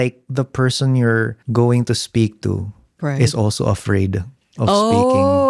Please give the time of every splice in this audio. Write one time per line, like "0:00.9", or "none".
0:01.4